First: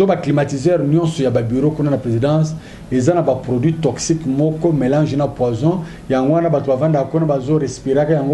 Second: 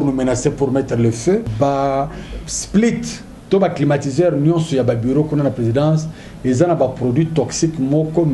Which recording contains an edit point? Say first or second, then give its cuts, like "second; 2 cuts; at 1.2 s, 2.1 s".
second; 1 cut; at 1.5 s